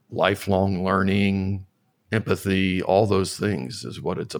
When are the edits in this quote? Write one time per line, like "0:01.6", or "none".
none